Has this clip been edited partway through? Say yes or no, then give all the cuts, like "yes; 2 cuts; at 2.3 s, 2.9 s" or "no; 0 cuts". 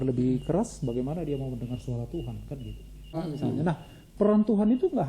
yes; 1 cut; at 3.1 s